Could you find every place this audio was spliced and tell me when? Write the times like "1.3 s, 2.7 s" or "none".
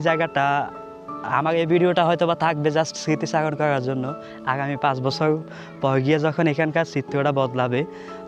none